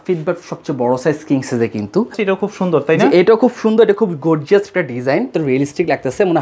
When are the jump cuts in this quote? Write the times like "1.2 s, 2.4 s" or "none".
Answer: 2.2 s, 5.3 s